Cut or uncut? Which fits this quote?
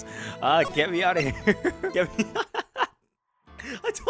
cut